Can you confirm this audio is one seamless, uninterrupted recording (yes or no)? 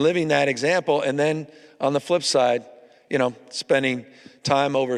yes